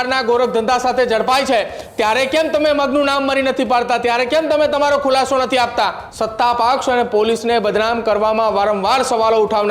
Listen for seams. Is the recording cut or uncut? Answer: cut